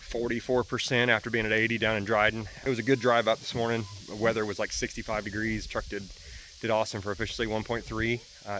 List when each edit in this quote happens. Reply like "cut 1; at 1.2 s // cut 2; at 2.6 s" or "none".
cut 1; at 2.5 s